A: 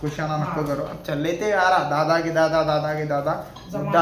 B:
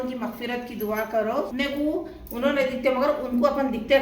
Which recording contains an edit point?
B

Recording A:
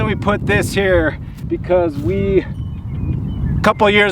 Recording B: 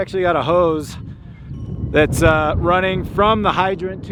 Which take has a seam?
A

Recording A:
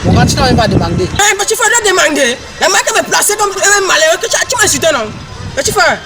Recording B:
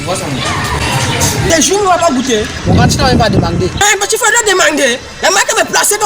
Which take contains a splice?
B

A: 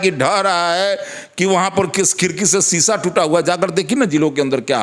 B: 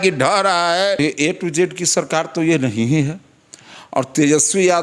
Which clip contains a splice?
B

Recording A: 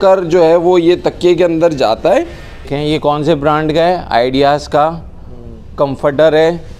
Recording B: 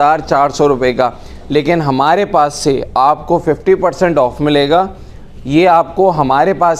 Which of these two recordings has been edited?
A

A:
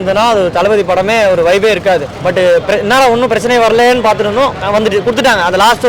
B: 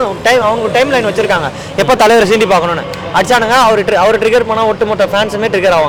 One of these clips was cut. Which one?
A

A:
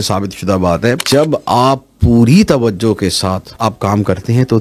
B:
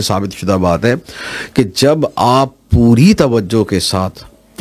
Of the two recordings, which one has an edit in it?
A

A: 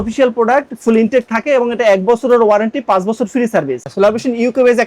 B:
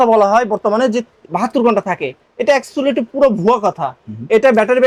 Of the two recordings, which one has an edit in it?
A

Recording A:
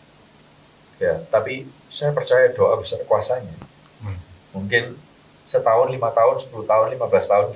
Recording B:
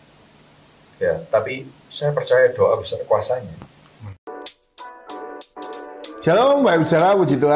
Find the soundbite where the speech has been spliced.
B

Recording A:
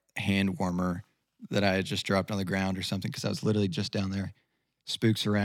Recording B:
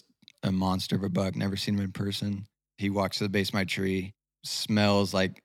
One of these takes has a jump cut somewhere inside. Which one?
B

